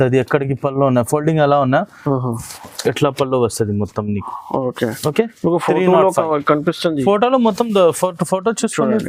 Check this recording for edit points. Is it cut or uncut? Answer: uncut